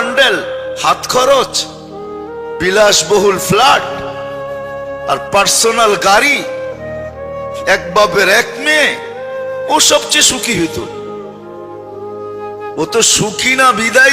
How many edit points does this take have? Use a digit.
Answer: 4